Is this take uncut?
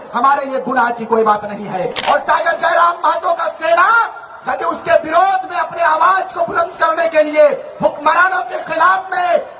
no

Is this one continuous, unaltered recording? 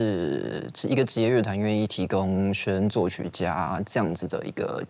yes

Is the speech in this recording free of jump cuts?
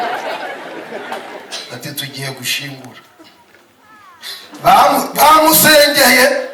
no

